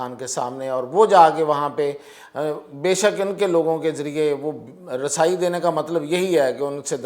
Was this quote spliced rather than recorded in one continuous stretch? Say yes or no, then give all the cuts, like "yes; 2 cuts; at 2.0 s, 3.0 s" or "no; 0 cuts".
no; 0 cuts